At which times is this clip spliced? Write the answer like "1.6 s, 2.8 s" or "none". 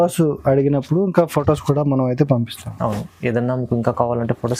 none